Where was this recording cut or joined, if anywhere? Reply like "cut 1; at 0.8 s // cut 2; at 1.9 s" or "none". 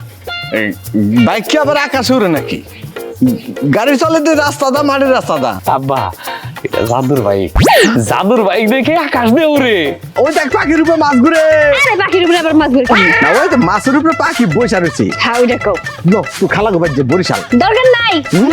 cut 1; at 5.6 s // cut 2; at 10.1 s